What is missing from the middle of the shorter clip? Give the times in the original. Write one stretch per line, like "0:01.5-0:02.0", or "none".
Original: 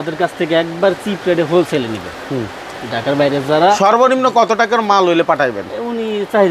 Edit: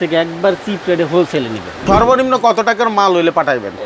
0:02.2-0:03.8